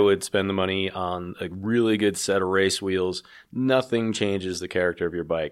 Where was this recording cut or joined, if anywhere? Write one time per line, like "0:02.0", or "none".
none